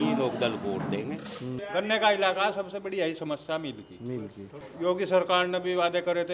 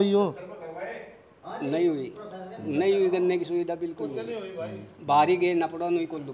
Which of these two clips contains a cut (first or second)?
first